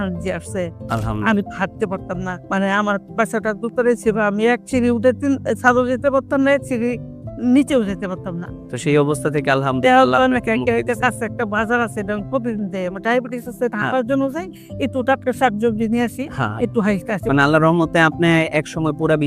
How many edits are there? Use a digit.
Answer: 1